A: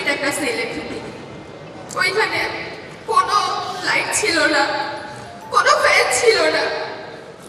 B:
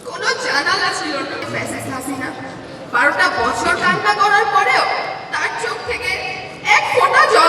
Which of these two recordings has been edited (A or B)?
B